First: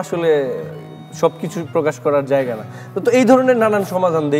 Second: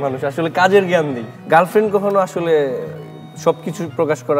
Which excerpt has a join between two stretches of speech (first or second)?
second